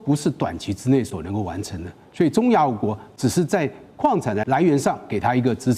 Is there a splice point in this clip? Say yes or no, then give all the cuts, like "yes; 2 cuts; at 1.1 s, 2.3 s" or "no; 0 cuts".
yes; 1 cut; at 4.4 s